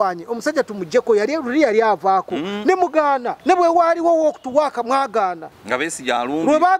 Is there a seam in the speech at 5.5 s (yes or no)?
yes